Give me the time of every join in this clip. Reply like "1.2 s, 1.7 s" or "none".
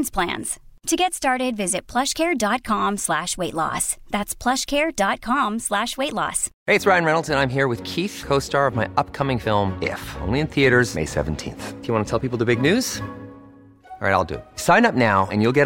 6.5 s